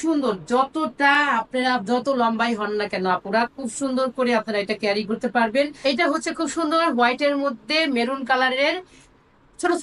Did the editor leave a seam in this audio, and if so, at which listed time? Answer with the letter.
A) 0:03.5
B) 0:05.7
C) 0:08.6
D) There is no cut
B